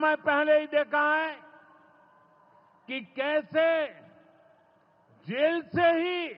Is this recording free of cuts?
yes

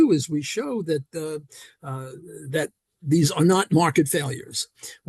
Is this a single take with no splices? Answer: yes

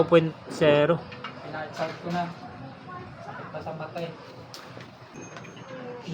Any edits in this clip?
yes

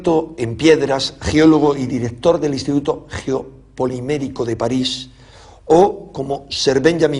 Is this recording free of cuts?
no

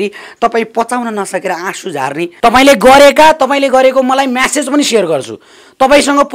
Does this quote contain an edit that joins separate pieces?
yes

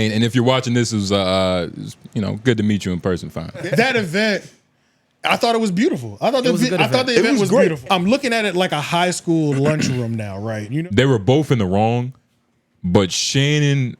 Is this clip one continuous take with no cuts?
no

